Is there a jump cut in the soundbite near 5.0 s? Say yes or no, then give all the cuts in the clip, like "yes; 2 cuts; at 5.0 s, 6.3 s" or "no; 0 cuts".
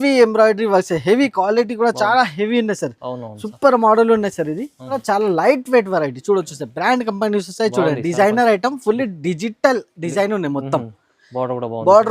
yes; 1 cut; at 5.0 s